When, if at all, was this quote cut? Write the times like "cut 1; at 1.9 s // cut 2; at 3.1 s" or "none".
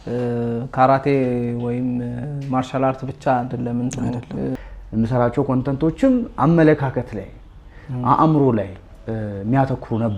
cut 1; at 4.6 s